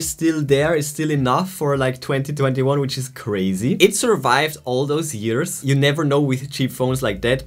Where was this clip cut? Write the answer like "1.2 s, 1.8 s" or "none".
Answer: none